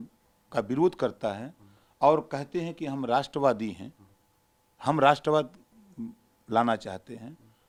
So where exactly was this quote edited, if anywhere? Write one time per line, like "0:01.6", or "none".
none